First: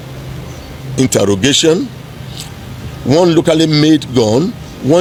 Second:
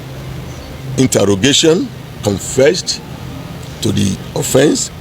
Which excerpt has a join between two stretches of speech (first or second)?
second